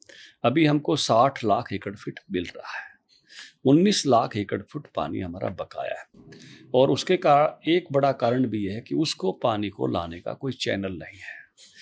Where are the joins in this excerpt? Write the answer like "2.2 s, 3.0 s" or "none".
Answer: none